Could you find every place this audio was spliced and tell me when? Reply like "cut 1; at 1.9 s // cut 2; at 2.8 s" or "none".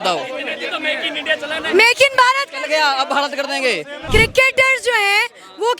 cut 1; at 4.0 s